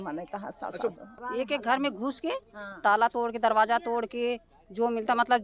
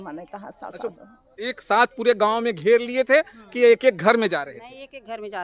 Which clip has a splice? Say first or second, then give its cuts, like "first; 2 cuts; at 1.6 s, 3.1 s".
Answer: first; 1 cut; at 1.1 s